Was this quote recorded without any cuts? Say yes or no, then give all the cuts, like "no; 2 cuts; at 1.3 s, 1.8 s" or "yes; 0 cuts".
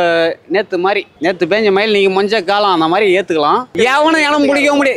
no; 1 cut; at 3.7 s